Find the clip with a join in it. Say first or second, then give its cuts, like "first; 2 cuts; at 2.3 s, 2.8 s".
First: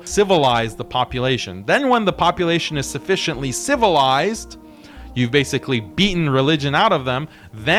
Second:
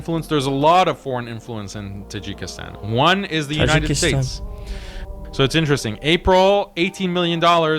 second; 1 cut; at 4.8 s